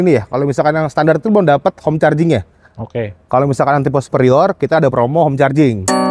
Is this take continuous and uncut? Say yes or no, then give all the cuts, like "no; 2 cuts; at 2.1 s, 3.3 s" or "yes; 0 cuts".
yes; 0 cuts